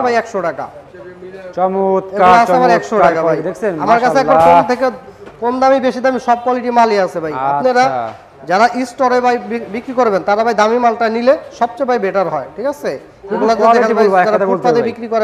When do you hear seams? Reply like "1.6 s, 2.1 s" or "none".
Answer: none